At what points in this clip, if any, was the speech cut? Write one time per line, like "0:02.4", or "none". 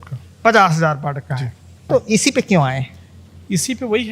0:01.8